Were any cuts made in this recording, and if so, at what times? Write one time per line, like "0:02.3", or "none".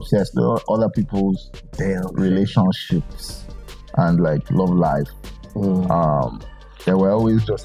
none